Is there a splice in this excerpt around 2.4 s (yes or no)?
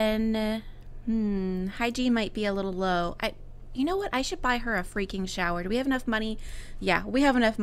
no